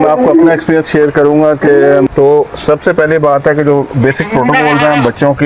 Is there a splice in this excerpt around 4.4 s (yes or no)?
no